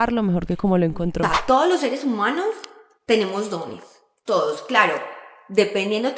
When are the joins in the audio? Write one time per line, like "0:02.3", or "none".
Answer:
0:01.3